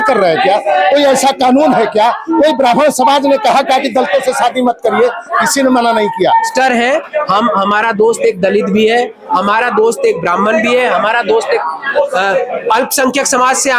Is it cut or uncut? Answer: cut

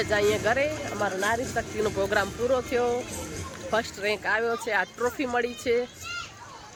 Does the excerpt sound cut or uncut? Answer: uncut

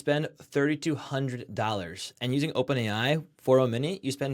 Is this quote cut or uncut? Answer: uncut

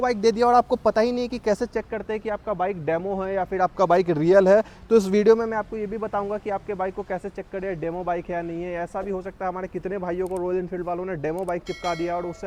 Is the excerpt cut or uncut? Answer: uncut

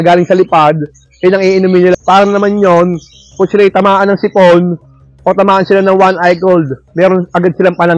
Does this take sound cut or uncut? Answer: cut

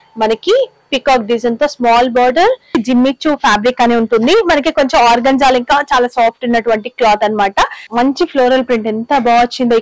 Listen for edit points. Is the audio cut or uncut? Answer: cut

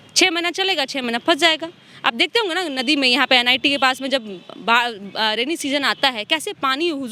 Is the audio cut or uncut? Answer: uncut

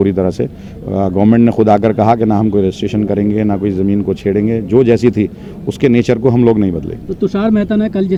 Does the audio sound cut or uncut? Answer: uncut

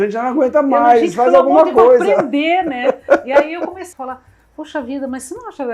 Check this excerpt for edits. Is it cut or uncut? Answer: cut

